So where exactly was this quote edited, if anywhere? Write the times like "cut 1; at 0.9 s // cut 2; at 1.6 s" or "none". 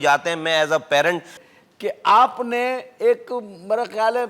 cut 1; at 1.4 s

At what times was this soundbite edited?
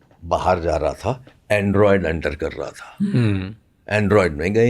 none

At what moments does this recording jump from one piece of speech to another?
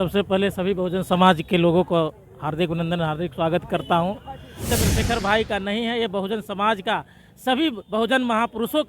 cut 1; at 4.7 s

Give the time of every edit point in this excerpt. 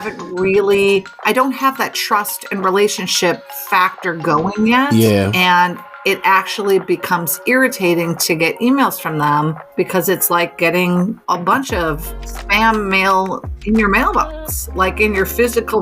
cut 1; at 3.3 s // cut 2; at 11.2 s

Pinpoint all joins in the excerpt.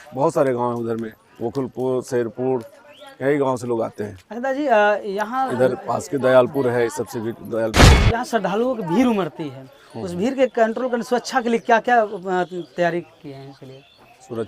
cut 1; at 8.0 s

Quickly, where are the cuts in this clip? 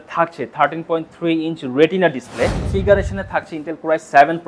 cut 1; at 2.7 s

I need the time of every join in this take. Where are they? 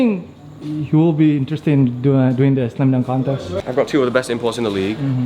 cut 1; at 3.6 s

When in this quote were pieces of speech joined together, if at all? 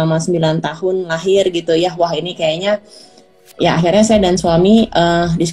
none

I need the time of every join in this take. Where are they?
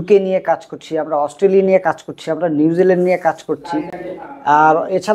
none

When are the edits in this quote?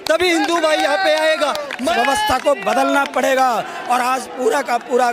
cut 1; at 1.8 s

